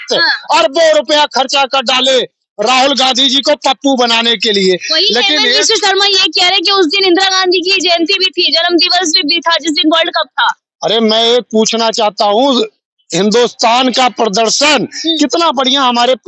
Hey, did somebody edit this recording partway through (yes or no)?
no